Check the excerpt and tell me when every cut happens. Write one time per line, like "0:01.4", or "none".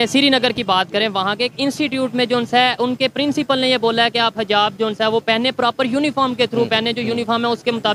none